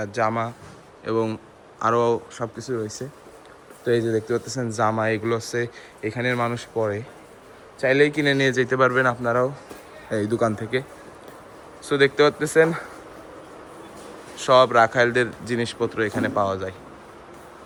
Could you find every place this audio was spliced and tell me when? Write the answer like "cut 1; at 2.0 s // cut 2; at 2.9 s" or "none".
none